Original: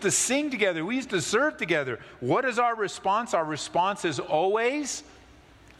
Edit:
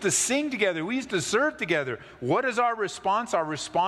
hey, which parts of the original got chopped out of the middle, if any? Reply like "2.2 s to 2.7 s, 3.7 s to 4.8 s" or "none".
none